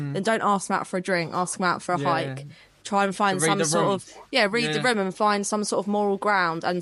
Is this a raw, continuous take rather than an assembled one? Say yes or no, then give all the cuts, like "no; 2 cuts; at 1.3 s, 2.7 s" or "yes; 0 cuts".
yes; 0 cuts